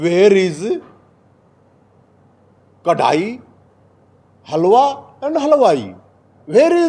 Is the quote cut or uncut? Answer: uncut